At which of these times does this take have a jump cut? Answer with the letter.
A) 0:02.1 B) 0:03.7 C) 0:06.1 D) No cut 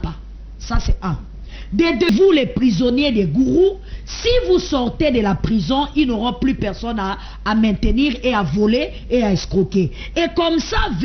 A